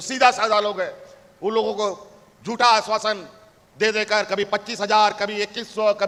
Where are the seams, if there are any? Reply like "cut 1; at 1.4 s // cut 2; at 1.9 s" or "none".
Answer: none